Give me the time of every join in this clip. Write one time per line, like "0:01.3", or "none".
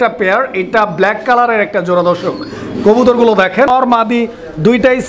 0:03.7